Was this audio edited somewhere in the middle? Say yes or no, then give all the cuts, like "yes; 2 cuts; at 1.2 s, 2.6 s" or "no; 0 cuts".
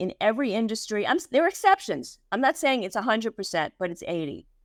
no; 0 cuts